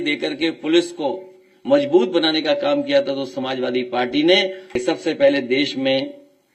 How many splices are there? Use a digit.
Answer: 1